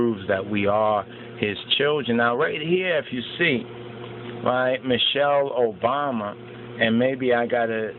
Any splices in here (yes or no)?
yes